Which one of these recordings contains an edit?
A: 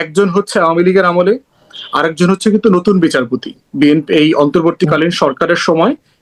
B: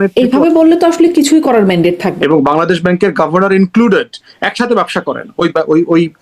B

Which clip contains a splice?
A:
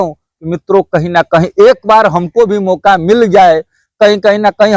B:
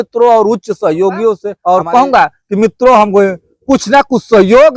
B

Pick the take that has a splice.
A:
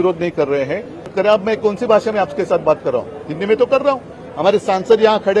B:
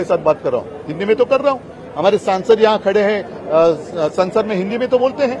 A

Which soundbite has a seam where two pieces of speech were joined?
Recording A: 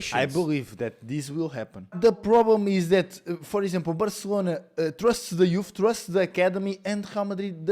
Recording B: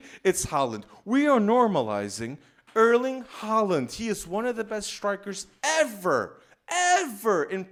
A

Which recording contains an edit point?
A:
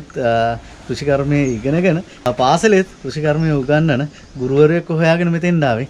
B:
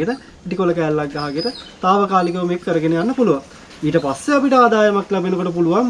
A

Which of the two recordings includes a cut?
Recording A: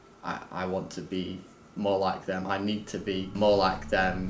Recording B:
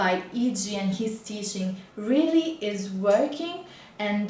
A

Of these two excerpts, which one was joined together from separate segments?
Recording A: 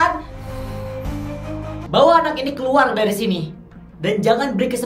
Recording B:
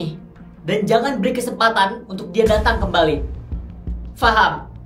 A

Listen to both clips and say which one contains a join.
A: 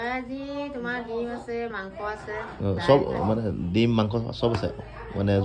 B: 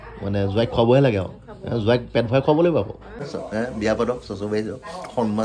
B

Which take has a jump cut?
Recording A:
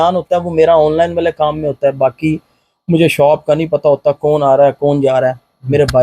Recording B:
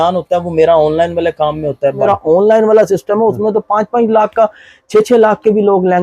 B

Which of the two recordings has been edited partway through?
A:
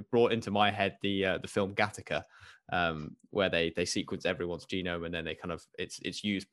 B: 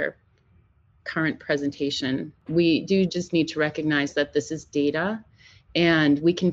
B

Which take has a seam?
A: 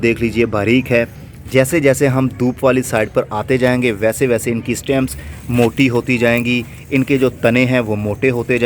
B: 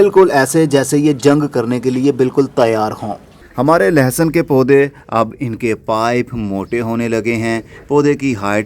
B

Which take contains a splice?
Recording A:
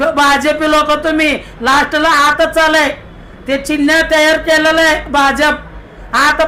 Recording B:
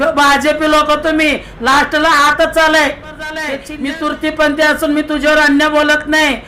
B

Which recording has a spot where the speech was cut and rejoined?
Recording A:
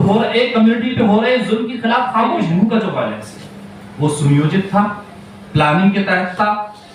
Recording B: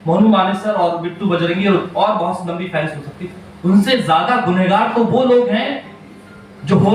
A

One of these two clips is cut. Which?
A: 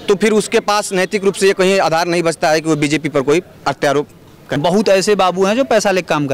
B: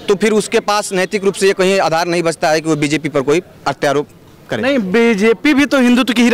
A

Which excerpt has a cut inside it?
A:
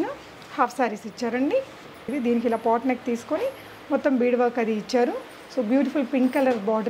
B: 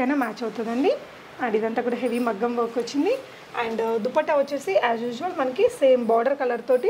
A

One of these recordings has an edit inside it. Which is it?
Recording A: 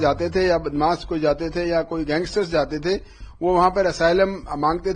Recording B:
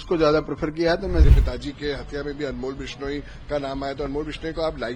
B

